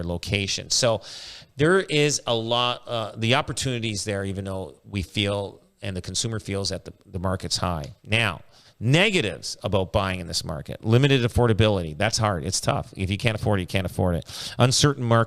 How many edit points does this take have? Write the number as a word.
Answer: zero